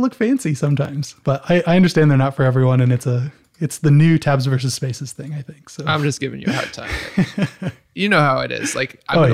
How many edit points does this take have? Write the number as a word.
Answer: one